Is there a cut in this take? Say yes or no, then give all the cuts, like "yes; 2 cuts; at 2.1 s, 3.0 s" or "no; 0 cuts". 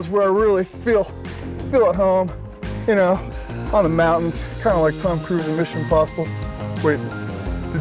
no; 0 cuts